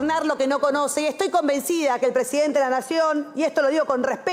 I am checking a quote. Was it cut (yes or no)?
no